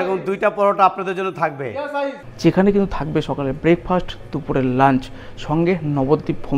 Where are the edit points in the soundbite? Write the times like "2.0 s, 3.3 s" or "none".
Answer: 2.2 s